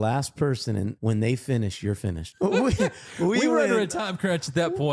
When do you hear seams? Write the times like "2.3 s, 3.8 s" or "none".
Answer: 0.9 s, 2.2 s

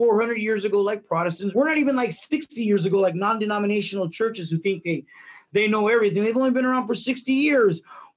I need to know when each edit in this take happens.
1.4 s

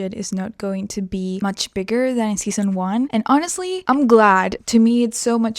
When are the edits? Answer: 1.4 s, 3.1 s, 3.8 s, 4.6 s

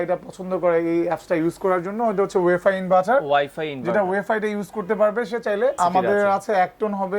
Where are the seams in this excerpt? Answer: 5.8 s

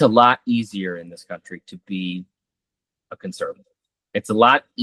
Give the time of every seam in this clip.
none

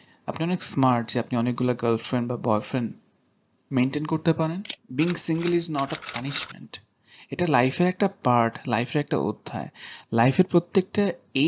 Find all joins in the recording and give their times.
4.7 s

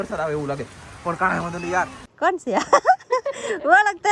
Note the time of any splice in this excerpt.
2.0 s

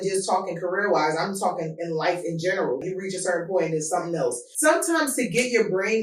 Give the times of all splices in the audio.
2.8 s, 4.5 s

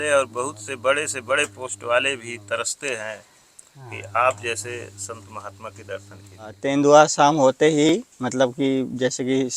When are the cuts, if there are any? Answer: 6.6 s

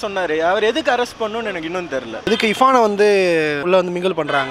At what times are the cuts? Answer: 2.2 s

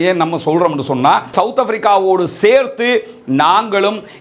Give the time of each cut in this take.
1.3 s

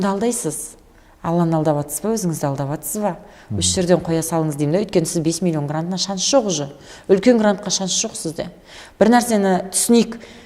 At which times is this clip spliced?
none

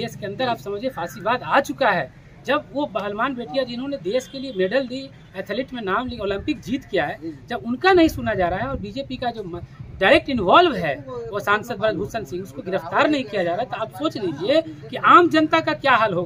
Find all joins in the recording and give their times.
none

